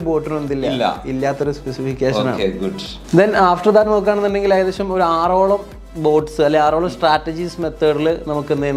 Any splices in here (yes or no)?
no